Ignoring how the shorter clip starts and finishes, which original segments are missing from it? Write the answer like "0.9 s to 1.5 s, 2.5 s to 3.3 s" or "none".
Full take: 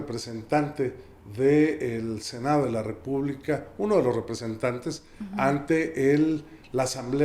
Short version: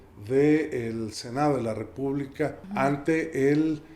3.7 s to 5.2 s